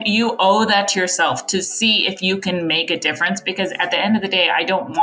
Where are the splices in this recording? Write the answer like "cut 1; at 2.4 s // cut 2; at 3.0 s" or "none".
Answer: none